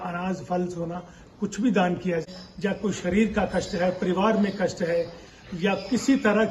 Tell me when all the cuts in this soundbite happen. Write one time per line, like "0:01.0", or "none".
0:02.4